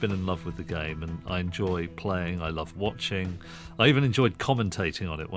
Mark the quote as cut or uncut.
uncut